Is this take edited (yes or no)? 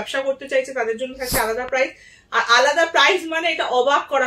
no